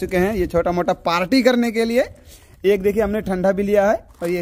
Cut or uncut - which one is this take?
uncut